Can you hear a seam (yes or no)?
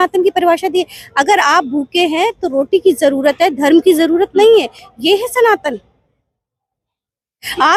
no